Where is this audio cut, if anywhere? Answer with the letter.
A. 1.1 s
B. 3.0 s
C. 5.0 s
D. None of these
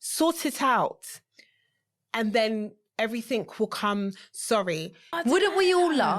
C